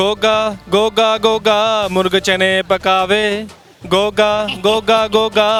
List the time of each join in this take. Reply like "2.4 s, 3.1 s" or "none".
none